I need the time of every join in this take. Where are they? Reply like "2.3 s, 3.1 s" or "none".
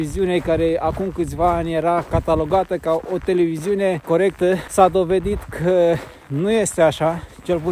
none

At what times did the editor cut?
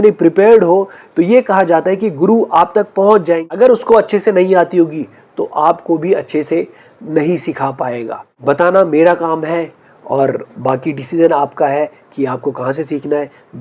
3.5 s, 8.2 s

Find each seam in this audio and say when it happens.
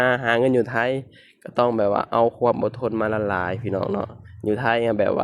none

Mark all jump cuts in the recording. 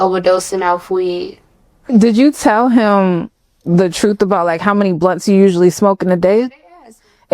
1.9 s

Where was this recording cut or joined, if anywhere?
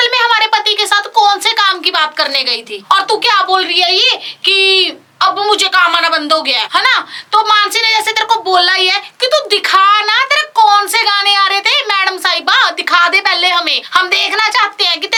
none

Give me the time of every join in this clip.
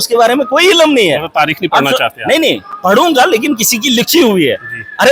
none

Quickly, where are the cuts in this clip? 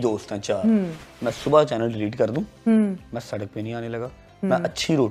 1.0 s

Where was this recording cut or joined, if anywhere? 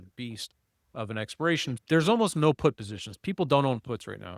1.8 s

